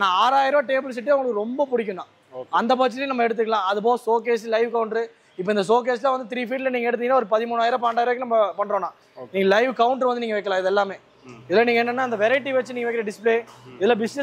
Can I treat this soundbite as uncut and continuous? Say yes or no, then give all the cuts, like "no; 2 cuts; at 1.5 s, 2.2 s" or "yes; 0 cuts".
yes; 0 cuts